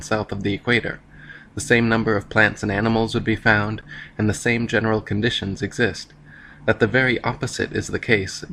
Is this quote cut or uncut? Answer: uncut